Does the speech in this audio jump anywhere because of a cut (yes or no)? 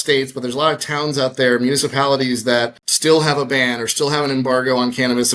yes